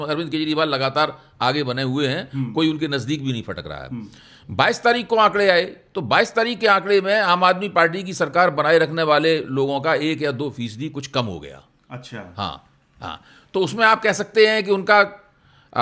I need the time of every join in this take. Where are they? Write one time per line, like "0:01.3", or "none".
none